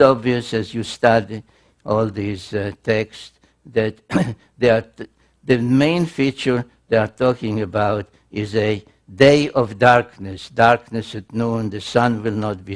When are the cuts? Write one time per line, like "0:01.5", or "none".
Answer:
0:07.4